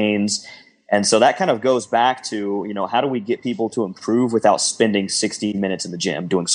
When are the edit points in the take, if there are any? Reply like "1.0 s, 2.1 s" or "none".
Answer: 5.5 s